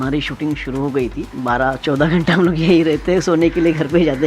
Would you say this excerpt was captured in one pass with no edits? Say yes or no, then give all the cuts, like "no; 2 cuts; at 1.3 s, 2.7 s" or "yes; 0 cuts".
no; 1 cut; at 1.3 s